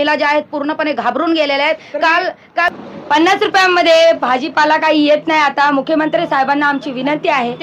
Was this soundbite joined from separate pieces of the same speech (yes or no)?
yes